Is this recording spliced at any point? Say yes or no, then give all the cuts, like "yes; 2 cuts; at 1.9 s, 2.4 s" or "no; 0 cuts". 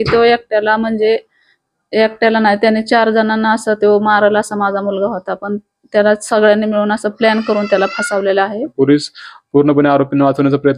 yes; 1 cut; at 8.7 s